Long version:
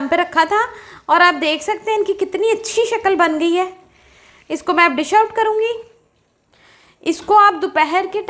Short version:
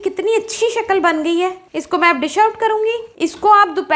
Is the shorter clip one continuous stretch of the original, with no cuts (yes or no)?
no